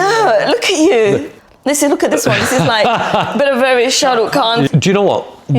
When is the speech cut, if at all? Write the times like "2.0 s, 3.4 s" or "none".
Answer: 1.3 s, 4.7 s